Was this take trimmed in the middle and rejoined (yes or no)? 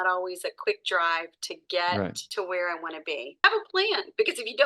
yes